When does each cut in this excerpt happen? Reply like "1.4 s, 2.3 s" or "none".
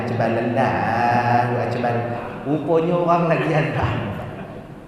2.3 s